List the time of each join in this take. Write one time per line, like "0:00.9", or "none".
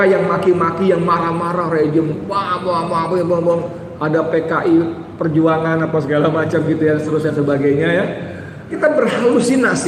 0:08.7